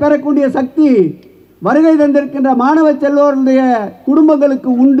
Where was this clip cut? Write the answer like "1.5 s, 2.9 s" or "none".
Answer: none